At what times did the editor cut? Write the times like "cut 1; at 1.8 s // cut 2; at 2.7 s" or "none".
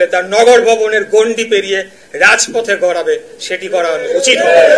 none

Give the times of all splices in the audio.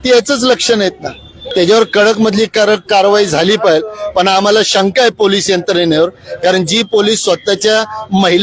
cut 1; at 1.4 s

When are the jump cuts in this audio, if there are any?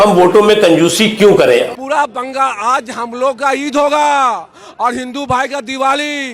cut 1; at 1.7 s

